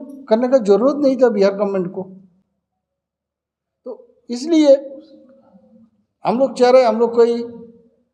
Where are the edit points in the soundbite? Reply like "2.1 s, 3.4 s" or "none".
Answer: none